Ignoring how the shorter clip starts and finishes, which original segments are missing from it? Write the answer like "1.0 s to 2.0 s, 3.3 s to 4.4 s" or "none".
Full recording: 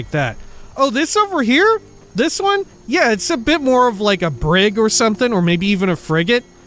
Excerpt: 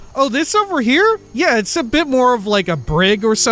1.9 s to 2.8 s